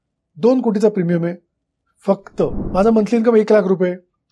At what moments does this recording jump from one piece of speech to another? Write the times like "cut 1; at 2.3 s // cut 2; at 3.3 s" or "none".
cut 1; at 2.6 s